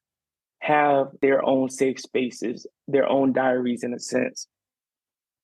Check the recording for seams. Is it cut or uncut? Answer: cut